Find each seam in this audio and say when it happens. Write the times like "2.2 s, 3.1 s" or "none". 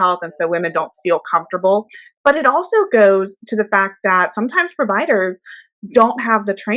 2.0 s